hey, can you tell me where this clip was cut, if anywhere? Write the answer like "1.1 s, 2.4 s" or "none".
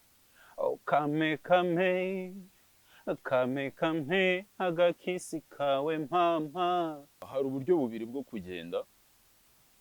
7.3 s